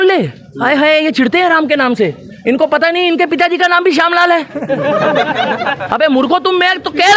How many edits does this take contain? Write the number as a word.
zero